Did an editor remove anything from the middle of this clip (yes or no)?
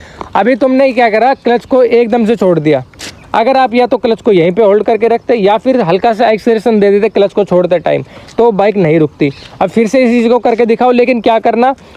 no